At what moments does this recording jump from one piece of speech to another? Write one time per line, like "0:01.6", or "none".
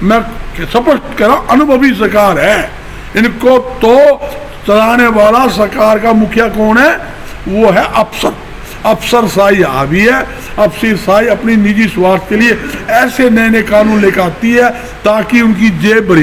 none